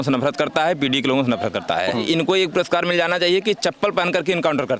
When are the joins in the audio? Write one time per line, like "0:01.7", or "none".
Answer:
0:02.0